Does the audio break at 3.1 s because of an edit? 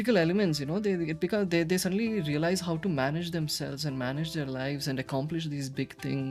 no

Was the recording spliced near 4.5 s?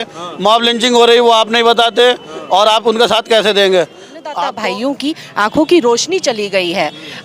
yes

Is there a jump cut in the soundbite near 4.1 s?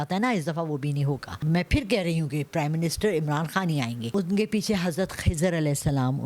yes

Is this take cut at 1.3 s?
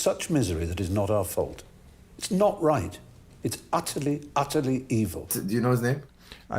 no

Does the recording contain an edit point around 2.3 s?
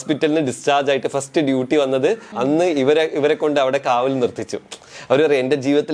yes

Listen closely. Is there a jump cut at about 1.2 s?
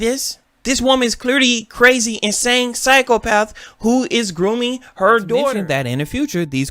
no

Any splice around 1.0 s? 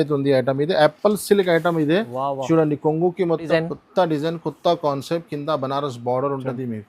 no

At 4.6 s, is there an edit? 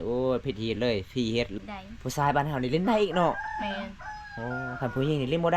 no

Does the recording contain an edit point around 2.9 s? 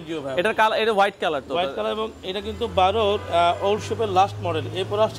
no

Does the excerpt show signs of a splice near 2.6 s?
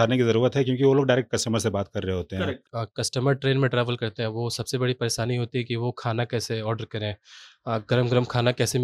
yes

